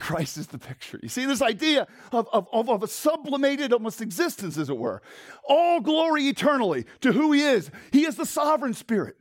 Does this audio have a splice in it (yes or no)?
no